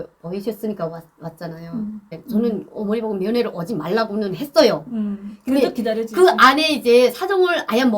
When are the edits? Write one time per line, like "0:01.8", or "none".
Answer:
0:02.2